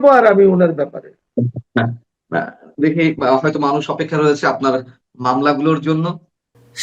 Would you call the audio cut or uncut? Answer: uncut